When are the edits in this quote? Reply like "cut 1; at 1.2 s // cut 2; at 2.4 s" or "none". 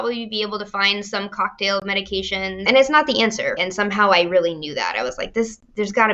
cut 1; at 2.6 s // cut 2; at 3.6 s